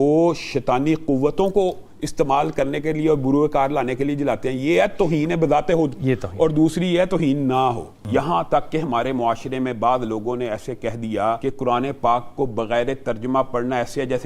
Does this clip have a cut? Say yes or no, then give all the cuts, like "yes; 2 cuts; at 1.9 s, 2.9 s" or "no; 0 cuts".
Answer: yes; 2 cuts; at 8.0 s, 11.4 s